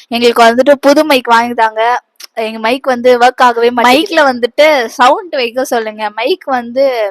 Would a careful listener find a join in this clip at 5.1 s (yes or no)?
no